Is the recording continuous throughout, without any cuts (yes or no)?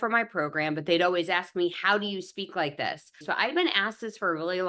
no